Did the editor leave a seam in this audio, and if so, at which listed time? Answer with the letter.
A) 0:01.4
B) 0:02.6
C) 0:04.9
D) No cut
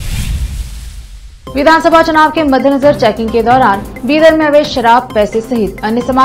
A